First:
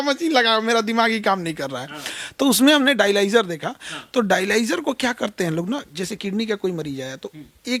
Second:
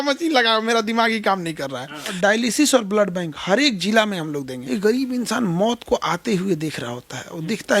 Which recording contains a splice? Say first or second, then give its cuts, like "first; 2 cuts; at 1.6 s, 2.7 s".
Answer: second; 2 cuts; at 2.1 s, 4.6 s